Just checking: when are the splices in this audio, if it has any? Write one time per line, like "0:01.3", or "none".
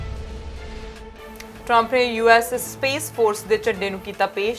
0:01.1